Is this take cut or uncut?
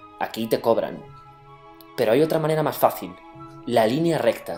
uncut